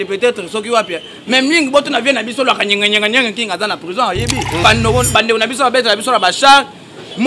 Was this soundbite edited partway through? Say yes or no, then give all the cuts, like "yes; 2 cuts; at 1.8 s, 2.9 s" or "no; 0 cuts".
yes; 1 cut; at 4.6 s